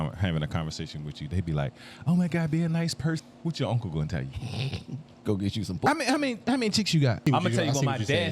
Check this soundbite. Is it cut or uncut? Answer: cut